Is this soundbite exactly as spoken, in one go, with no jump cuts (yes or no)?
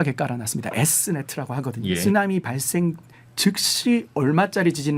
no